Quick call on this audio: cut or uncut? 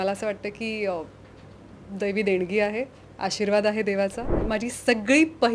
cut